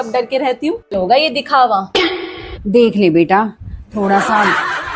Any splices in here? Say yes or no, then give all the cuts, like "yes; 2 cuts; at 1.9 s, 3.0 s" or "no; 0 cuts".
no; 0 cuts